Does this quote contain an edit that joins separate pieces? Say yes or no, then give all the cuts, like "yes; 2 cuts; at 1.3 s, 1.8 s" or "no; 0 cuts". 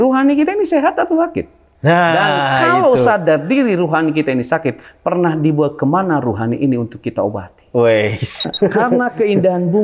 yes; 1 cut; at 8.5 s